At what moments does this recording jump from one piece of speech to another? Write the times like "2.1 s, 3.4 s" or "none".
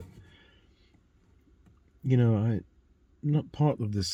none